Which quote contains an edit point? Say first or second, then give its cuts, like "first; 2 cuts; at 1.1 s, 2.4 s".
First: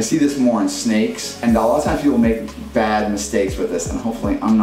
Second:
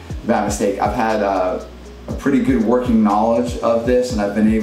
first; 1 cut; at 1.4 s